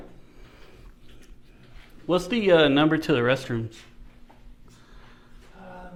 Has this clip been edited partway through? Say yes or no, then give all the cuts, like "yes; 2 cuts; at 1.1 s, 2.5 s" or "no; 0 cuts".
no; 0 cuts